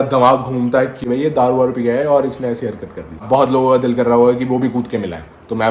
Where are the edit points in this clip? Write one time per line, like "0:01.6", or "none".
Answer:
0:01.0
0:03.2